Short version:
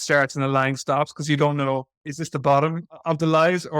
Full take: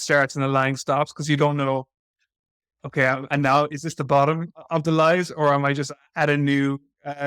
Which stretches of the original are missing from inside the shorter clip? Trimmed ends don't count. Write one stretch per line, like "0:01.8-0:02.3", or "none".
0:02.2-0:03.8

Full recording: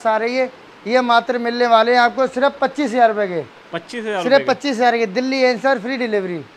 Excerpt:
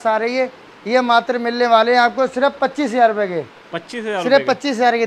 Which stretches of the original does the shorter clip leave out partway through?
none

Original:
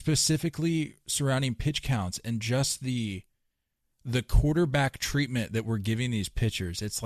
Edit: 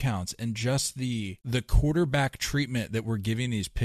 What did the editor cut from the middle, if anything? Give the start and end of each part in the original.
0:03.2-0:04.0

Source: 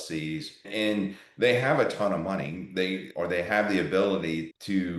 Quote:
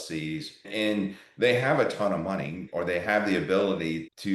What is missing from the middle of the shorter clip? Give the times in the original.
0:02.6-0:03.1

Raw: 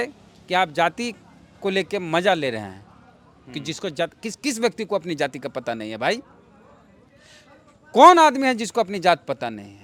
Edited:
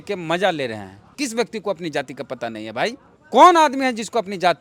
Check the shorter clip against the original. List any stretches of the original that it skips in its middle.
0:02.8-0:04.3
0:06.4-0:07.7

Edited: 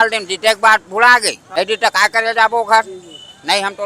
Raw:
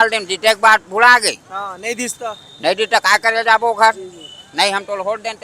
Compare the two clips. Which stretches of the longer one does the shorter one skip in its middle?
0:01.4-0:02.5

